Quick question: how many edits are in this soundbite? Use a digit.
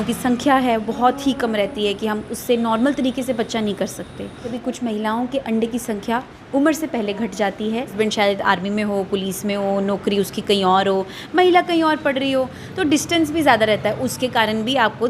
2